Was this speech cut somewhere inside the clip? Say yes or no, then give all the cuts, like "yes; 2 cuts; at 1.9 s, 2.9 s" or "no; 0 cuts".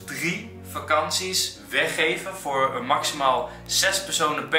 no; 0 cuts